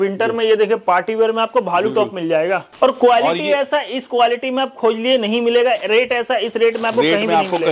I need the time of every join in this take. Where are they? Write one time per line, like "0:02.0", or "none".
0:02.7